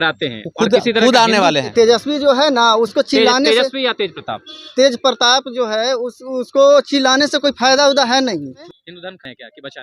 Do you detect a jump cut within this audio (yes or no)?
yes